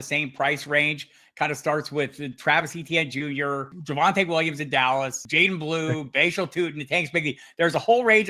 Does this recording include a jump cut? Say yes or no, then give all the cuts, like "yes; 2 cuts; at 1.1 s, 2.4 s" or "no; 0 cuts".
yes; 2 cuts; at 3.7 s, 5.2 s